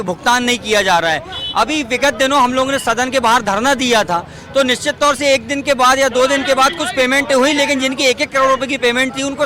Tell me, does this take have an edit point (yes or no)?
no